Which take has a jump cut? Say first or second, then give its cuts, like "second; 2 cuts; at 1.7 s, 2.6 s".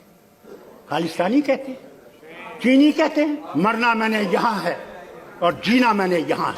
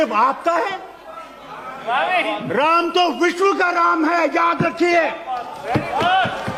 first; 1 cut; at 3.4 s